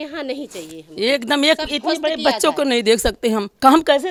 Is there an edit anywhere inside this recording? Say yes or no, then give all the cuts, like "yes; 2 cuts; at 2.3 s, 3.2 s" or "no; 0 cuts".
no; 0 cuts